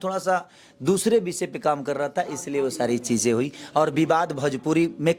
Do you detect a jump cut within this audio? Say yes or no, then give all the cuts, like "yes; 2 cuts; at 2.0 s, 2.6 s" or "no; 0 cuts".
no; 0 cuts